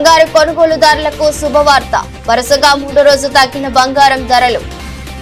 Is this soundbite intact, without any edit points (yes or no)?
yes